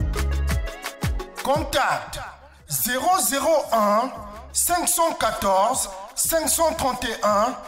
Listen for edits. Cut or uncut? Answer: cut